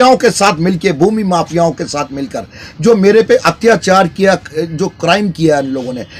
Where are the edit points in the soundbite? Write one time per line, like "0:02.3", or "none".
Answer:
none